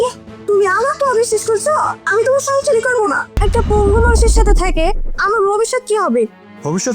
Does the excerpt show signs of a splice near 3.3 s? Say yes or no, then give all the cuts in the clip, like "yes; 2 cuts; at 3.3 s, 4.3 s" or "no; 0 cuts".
yes; 1 cut; at 3.3 s